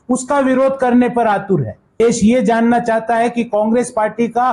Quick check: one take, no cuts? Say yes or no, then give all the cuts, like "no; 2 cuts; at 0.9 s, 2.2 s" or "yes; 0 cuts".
no; 1 cut; at 2.0 s